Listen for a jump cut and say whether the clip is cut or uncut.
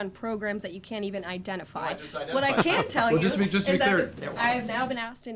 cut